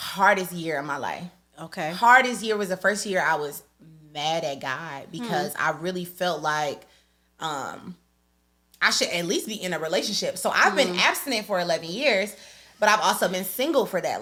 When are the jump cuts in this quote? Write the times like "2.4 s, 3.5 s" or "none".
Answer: none

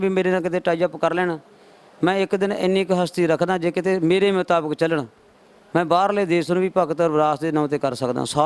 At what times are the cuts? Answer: none

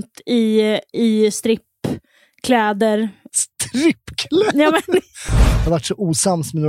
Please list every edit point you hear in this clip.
3.3 s, 5.5 s

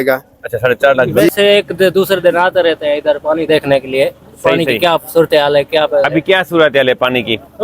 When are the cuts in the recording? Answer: 1.3 s

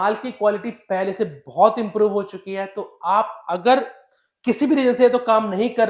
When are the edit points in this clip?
none

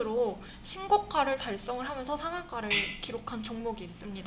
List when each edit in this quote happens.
none

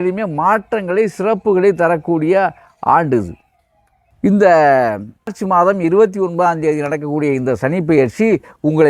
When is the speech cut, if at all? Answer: none

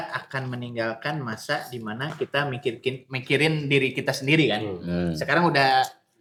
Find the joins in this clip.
none

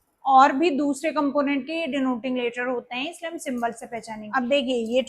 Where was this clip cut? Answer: 4.2 s

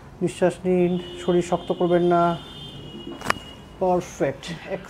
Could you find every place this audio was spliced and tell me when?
none

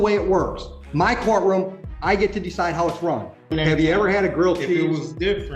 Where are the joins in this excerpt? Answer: 3.3 s

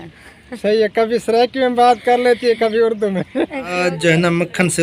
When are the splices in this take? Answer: 3.7 s

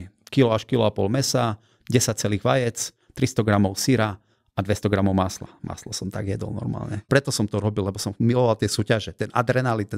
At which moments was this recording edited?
7.0 s

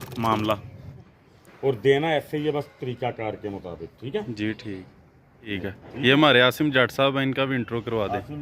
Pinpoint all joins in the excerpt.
1.0 s, 5.6 s

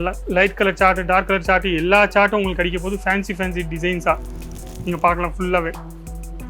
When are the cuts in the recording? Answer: 4.6 s

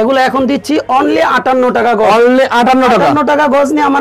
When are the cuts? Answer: none

